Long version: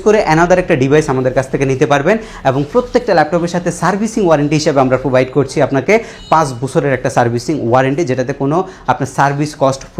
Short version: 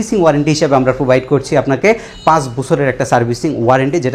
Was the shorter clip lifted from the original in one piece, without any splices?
yes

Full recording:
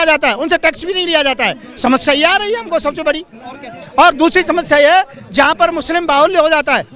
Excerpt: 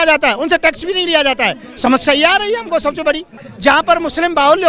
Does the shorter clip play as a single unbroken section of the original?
no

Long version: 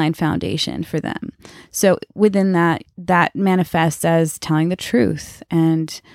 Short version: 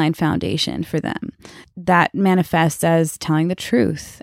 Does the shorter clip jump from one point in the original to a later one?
yes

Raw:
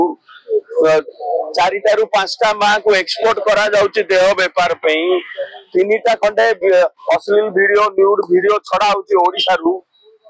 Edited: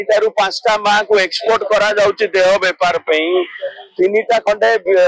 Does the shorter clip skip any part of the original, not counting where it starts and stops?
no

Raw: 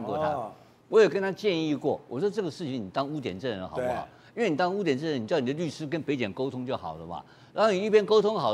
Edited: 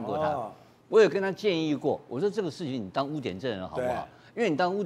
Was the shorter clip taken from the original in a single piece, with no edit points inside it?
yes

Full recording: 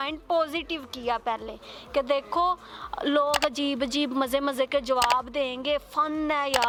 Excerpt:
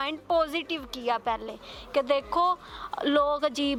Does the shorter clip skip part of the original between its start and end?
no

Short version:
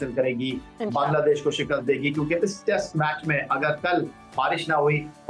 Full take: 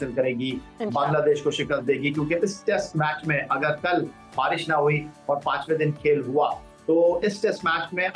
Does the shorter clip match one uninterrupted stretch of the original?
yes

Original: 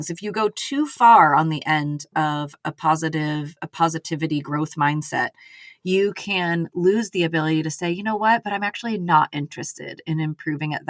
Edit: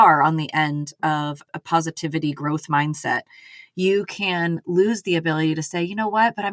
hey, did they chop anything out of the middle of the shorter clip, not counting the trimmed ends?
yes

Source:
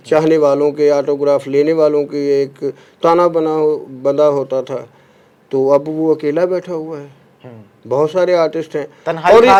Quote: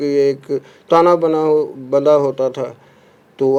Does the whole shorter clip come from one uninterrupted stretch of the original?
yes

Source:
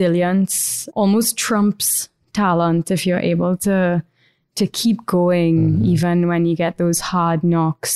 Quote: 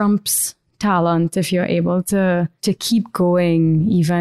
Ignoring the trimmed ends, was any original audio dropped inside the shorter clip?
yes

